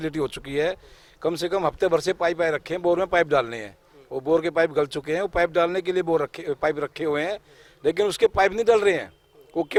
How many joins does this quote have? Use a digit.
0